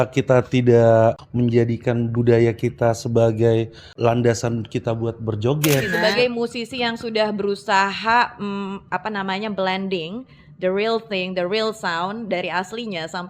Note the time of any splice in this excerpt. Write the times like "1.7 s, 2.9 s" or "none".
1.2 s, 3.9 s, 5.9 s